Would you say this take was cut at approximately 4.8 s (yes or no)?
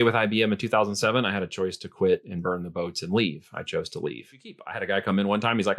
yes